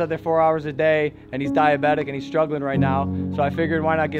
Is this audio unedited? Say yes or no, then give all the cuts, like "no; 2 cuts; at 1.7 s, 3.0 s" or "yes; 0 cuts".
yes; 0 cuts